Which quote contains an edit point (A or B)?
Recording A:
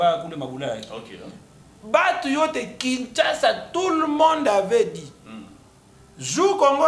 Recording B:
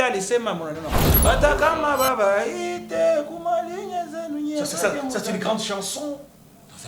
B